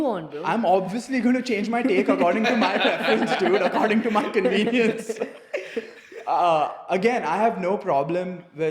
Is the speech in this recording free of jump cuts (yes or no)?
yes